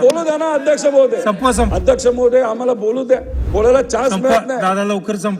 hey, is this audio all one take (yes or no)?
no